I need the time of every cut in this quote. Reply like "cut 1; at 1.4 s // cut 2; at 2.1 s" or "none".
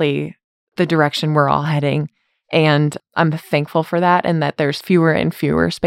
cut 1; at 3.0 s